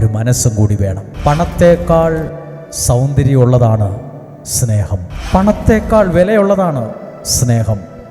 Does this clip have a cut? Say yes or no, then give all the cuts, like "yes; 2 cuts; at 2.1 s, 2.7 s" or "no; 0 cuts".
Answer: yes; 2 cuts; at 1.1 s, 5.1 s